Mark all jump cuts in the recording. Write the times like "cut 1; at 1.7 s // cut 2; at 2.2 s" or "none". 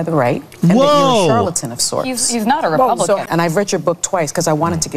cut 1; at 3.2 s